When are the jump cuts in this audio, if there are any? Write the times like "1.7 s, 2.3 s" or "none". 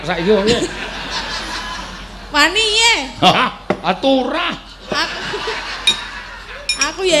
none